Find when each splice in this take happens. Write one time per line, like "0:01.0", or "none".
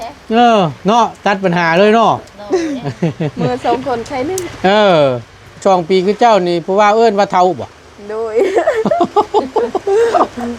0:05.6